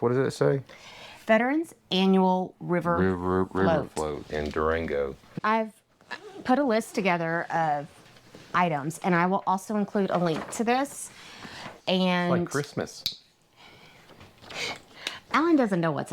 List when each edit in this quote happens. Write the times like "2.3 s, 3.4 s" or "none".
5.3 s